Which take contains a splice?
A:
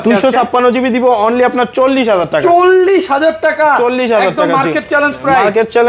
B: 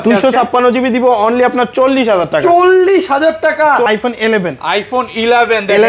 B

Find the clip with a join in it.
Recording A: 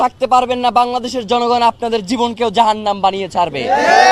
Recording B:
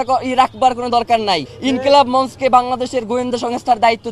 B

